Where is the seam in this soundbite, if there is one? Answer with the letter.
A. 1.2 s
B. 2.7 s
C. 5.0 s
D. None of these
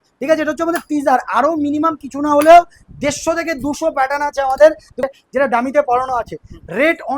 C